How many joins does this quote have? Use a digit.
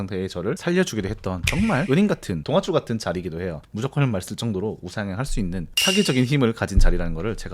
1